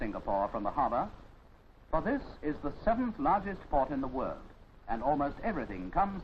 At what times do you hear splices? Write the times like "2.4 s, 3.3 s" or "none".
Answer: 3.4 s